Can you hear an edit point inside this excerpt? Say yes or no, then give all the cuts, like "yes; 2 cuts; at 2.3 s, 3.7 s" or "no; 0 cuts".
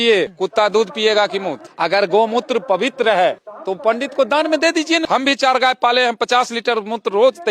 yes; 3 cuts; at 1.6 s, 3.8 s, 5.0 s